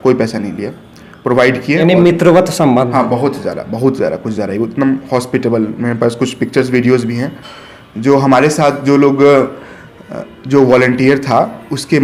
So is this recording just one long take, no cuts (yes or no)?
yes